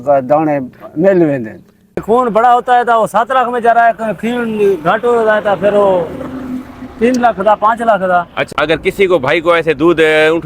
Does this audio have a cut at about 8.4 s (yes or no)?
yes